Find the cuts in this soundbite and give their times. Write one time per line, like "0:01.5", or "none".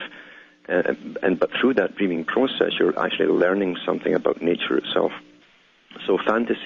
0:05.2

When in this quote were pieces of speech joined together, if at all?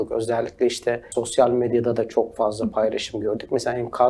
0:01.1

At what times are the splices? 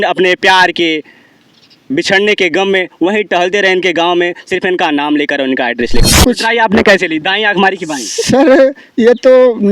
0:06.0

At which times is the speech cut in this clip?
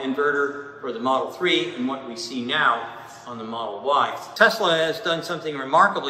0:04.2

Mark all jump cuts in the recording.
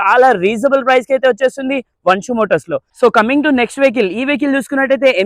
none

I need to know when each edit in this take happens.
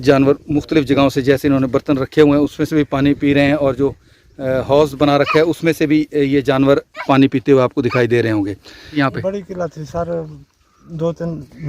0:08.9

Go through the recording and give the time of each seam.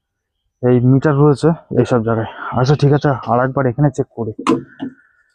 0:01.7

